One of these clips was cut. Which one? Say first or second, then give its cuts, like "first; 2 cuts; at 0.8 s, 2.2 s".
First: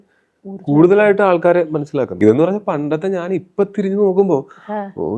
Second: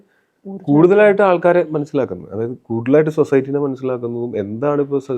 first; 1 cut; at 2.1 s